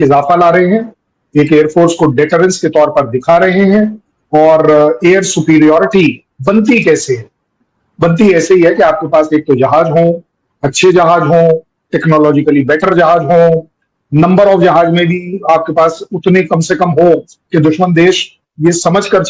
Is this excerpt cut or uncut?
uncut